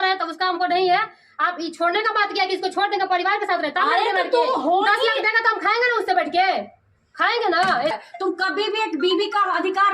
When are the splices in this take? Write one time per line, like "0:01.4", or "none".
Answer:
0:07.9